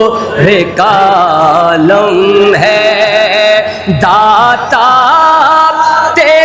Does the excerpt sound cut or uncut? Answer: uncut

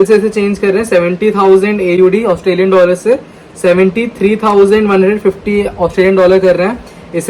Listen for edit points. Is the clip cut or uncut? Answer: uncut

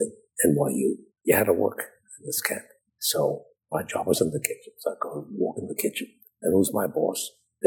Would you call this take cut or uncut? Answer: cut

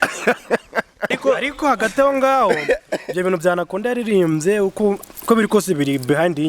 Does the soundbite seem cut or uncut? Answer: cut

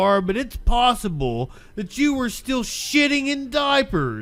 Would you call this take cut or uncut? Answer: uncut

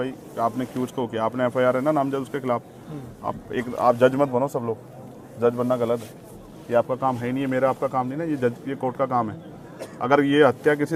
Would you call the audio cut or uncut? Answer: uncut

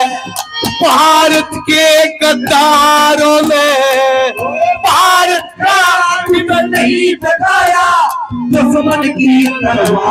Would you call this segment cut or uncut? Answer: uncut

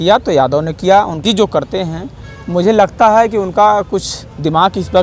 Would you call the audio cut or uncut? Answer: cut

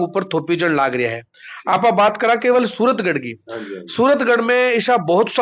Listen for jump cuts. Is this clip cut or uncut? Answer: uncut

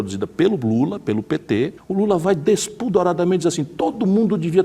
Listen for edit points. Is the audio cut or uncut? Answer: cut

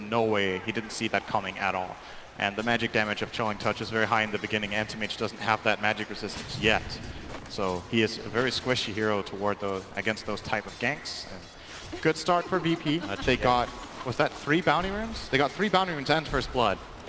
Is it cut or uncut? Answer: cut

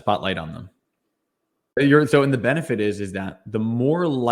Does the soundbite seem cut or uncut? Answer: cut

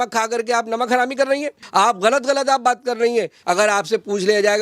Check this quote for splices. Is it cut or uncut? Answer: cut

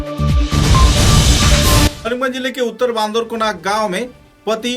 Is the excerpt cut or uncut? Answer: cut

